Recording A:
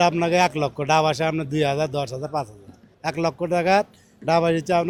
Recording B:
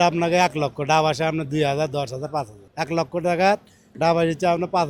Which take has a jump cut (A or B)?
B